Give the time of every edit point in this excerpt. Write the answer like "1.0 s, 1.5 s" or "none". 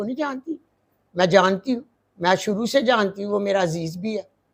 none